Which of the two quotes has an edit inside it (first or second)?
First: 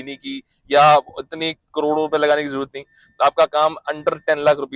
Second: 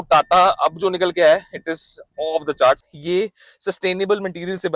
second